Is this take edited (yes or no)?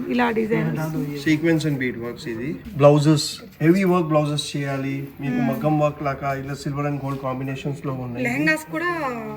yes